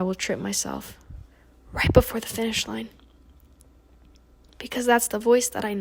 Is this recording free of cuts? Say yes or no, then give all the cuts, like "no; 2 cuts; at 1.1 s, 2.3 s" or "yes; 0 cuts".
yes; 0 cuts